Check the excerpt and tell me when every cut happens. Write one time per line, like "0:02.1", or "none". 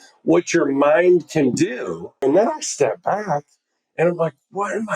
0:02.2

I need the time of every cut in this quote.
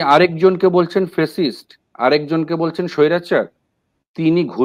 none

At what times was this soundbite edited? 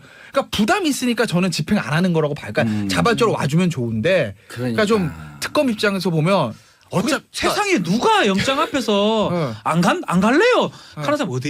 none

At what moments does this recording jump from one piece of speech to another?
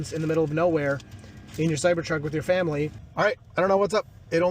0:03.0

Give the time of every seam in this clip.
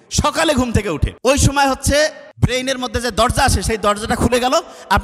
0:01.1
0:02.2

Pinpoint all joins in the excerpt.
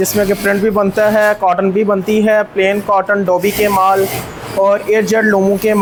none

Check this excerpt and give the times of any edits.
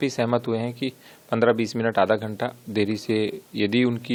none

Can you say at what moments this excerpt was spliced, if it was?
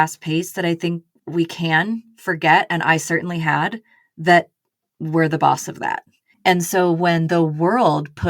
0:01.1

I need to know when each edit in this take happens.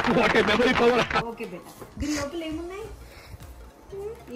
none

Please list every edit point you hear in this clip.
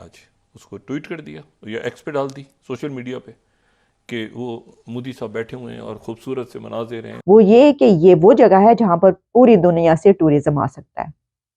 0:07.1

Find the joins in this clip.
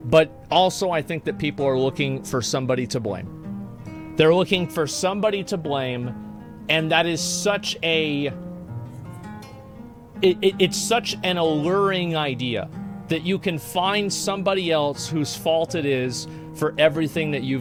none

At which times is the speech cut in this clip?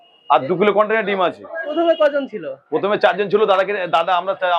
0:01.7

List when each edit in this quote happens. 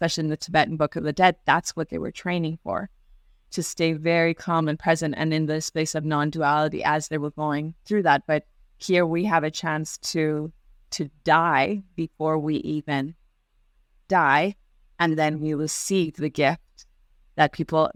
none

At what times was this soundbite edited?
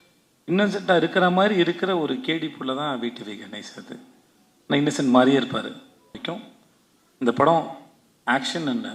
0:06.2

